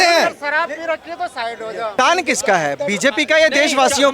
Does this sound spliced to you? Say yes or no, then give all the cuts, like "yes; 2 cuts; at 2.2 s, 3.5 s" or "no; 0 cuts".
yes; 1 cut; at 1.9 s